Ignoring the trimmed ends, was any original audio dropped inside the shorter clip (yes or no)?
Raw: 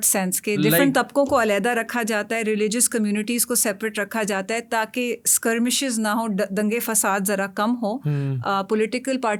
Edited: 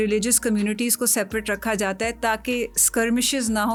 no